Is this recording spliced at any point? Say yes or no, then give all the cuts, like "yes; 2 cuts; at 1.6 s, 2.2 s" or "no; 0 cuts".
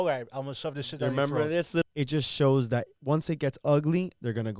yes; 1 cut; at 1.8 s